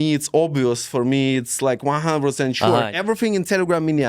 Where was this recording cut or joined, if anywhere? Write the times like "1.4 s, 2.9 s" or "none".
2.9 s